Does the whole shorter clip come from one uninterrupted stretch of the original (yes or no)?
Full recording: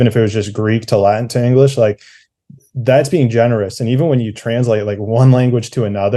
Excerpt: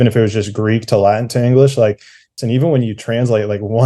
no